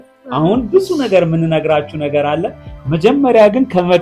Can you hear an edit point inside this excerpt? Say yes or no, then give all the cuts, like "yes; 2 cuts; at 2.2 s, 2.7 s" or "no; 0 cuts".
no; 0 cuts